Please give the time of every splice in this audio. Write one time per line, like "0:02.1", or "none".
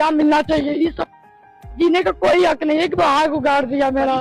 0:02.9